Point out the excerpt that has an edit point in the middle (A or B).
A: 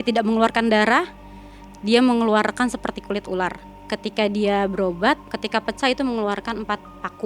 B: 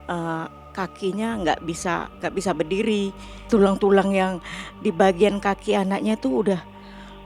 A